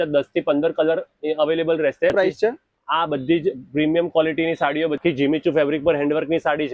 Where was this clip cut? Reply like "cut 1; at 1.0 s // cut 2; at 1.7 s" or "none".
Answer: cut 1; at 2.1 s // cut 2; at 5.0 s